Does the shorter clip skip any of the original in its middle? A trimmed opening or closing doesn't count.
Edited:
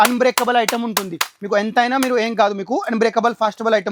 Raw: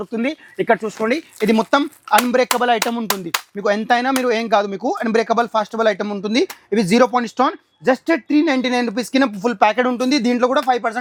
no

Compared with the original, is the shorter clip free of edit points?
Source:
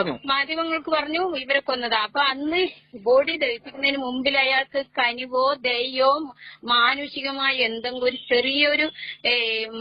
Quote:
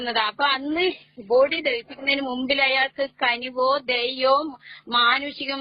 yes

